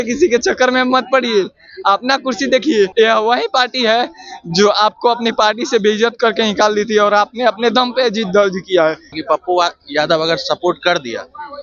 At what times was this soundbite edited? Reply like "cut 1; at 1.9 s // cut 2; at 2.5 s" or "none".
cut 1; at 2.9 s // cut 2; at 9.1 s